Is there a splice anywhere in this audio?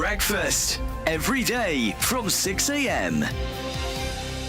no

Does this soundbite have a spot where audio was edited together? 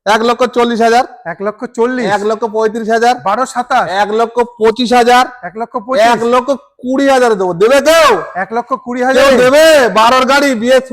no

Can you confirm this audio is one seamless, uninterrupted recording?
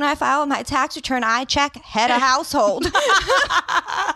yes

